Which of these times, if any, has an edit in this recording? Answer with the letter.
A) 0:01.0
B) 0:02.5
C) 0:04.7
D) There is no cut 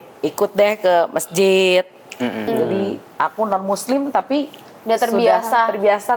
B